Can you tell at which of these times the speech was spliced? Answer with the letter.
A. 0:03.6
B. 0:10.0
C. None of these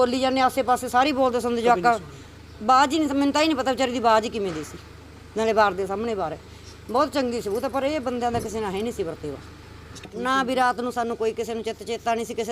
B